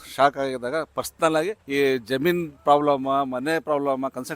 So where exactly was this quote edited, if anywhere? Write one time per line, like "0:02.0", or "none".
0:01.6